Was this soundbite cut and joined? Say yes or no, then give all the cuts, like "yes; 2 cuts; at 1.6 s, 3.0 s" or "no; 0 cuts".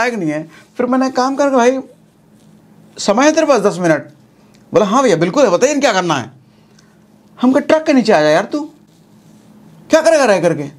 no; 0 cuts